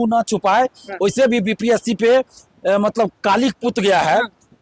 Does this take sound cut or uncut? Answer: uncut